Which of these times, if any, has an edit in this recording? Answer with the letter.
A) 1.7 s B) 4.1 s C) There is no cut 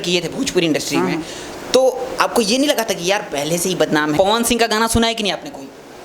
B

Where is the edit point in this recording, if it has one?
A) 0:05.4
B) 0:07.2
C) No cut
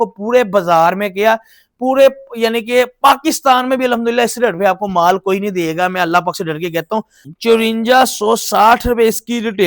B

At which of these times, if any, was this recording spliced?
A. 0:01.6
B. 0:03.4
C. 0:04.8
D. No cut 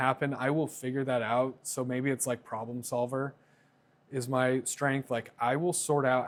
D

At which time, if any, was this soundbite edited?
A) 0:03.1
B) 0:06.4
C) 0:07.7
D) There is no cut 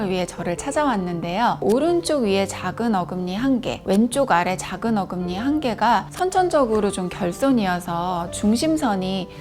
D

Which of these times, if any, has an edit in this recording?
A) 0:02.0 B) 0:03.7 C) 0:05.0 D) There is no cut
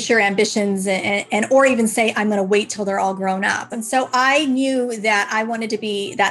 B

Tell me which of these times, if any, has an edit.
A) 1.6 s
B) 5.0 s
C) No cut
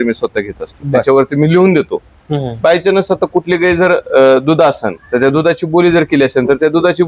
C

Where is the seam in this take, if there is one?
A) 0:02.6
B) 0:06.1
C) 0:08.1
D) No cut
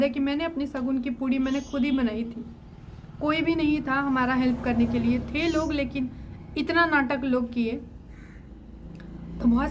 D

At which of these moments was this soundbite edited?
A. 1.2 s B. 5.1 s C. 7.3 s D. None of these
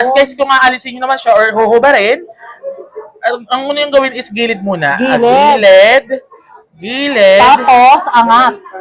D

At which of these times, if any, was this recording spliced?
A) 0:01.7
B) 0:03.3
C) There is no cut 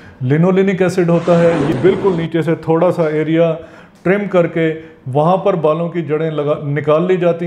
A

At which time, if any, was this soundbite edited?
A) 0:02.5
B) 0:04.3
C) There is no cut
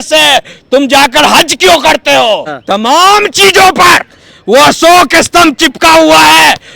A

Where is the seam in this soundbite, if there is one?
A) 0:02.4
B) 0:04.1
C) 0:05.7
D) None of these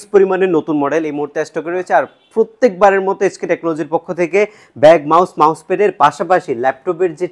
D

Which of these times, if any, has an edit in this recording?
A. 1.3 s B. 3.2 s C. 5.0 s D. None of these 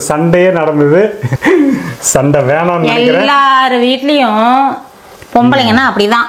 A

